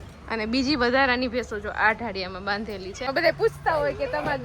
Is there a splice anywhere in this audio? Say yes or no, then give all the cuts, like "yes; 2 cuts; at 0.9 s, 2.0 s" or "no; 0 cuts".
yes; 1 cut; at 3.1 s